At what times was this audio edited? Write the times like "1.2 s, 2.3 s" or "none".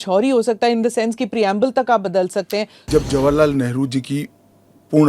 2.8 s